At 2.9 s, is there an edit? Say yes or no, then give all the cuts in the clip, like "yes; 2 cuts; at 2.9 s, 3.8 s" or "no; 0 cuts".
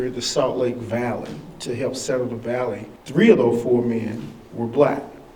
yes; 1 cut; at 2.9 s